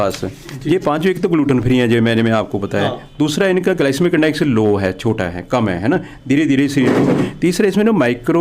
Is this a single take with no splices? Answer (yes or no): yes